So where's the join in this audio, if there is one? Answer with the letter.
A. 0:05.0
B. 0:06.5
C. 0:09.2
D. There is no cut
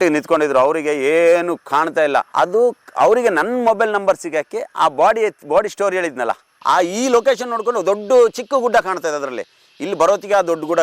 B